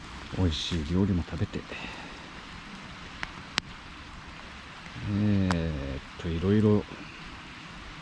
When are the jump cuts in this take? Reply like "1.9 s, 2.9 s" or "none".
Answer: none